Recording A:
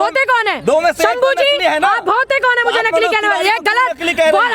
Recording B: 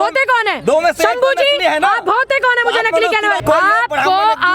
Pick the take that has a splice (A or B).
B